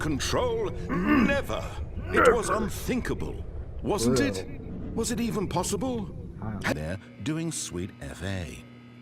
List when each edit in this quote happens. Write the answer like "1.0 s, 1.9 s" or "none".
6.7 s